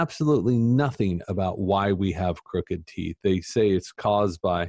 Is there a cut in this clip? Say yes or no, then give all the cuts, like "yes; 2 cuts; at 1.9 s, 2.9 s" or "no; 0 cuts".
no; 0 cuts